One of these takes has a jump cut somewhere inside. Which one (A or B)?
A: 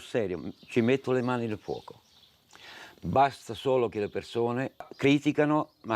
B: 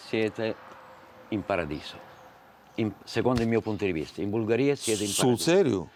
A